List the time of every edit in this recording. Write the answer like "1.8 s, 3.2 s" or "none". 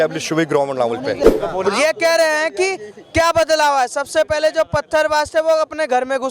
1.2 s